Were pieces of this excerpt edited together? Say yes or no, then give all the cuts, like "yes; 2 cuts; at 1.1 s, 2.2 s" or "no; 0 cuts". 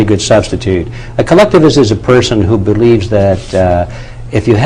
no; 0 cuts